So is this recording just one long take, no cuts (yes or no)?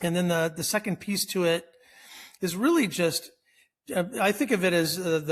yes